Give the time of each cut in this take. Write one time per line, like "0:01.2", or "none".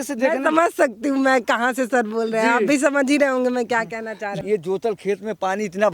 0:04.3